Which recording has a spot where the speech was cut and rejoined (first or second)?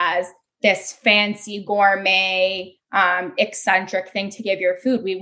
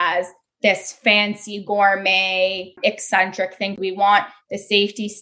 second